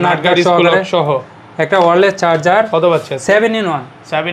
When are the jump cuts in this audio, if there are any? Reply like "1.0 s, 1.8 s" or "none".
none